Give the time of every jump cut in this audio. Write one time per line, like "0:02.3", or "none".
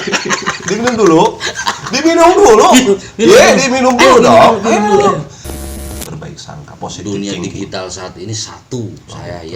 0:05.6